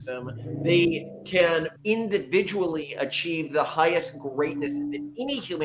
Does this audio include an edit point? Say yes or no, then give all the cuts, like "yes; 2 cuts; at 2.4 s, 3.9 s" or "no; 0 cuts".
yes; 1 cut; at 1.7 s